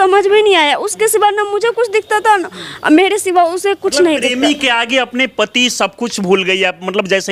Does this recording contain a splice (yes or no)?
no